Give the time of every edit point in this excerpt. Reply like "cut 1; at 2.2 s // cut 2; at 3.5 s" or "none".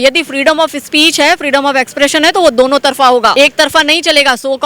cut 1; at 3.3 s